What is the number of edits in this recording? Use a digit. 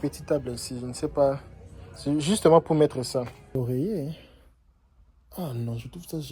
1